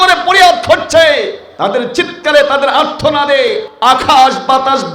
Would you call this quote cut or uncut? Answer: cut